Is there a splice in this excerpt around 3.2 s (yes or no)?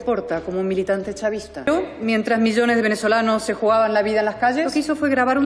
no